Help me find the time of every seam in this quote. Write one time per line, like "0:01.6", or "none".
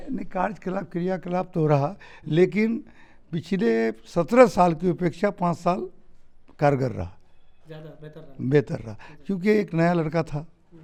none